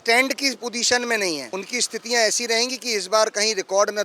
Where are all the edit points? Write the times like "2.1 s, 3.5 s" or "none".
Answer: 1.5 s